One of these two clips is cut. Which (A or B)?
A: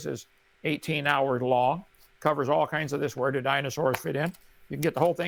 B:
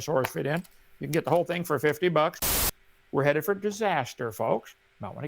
B